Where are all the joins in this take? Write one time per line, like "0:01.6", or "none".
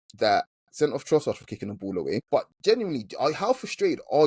0:02.2